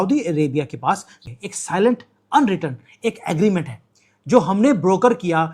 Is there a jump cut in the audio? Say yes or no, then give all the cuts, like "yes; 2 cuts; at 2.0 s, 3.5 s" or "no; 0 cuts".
yes; 1 cut; at 1.1 s